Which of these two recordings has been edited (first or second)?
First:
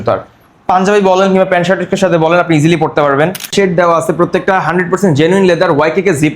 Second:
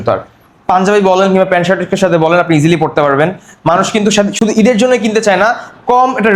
first